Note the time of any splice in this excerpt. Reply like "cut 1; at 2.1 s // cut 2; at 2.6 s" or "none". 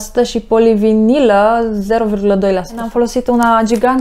cut 1; at 2.9 s

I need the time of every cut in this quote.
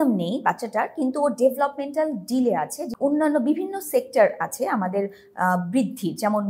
none

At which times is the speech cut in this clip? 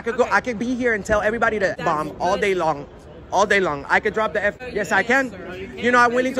cut 1; at 1.7 s // cut 2; at 4.6 s

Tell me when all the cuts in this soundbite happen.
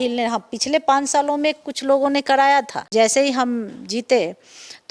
cut 1; at 2.8 s

